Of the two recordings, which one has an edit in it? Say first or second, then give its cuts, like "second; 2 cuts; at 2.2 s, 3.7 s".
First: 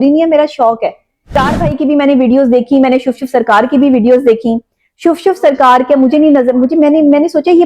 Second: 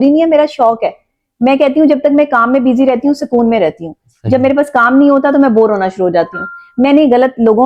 first; 1 cut; at 1.4 s